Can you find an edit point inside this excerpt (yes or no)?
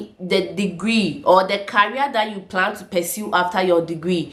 no